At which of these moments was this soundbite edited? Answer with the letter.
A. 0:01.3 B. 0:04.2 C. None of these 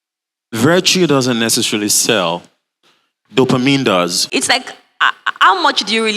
B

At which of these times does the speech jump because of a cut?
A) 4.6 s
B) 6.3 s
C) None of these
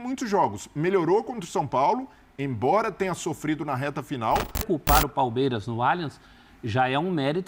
A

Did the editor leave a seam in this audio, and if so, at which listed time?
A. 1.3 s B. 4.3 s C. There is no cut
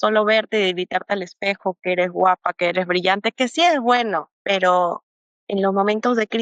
B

